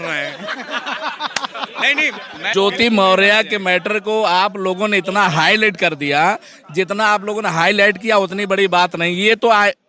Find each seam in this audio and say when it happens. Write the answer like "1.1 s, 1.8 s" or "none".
none